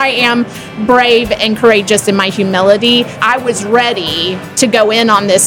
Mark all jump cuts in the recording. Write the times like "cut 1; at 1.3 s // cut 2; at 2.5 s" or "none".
cut 1; at 3.2 s // cut 2; at 4.4 s